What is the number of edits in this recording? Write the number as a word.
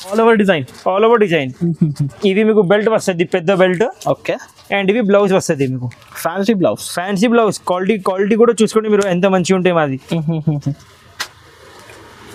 zero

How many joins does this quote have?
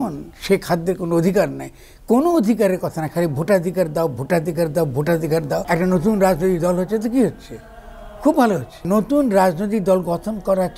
two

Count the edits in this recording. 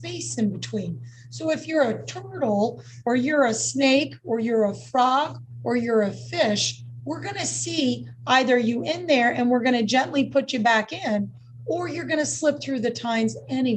zero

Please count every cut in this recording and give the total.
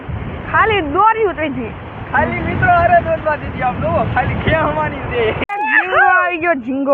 one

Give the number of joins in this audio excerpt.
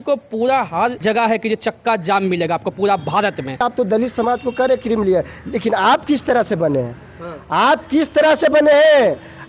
two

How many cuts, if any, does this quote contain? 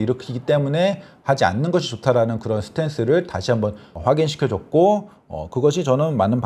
zero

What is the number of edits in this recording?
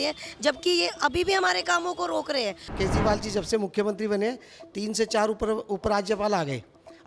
one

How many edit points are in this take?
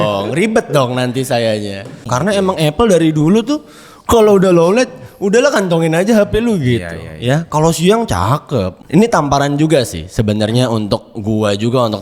two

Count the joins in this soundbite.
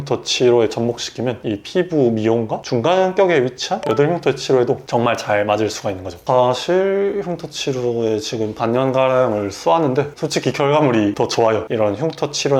three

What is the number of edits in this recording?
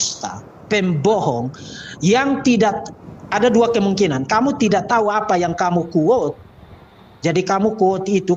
zero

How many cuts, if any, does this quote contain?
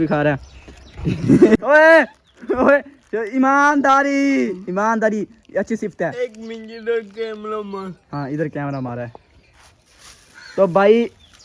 one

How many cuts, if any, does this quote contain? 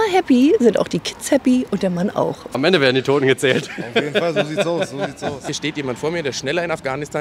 two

